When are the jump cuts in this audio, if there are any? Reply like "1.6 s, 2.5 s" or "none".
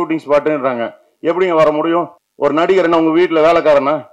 2.2 s